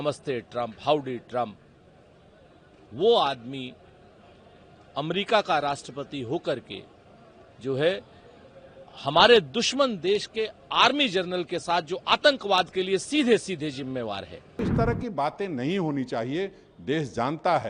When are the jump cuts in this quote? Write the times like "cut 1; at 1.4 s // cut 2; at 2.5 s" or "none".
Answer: cut 1; at 14.6 s